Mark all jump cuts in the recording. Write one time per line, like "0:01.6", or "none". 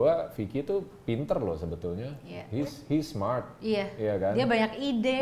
none